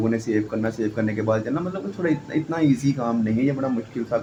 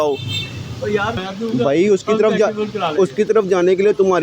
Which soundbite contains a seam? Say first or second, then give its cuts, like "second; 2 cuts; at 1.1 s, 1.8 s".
second; 1 cut; at 1.2 s